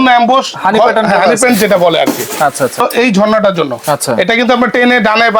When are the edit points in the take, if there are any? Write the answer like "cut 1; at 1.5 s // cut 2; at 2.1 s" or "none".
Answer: cut 1; at 2.8 s